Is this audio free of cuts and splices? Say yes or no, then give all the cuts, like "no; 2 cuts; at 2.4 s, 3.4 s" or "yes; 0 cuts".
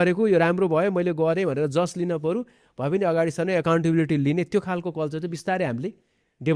yes; 0 cuts